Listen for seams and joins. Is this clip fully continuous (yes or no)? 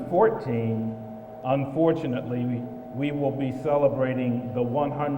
no